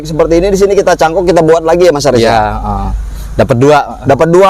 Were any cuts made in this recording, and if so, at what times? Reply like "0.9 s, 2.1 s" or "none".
none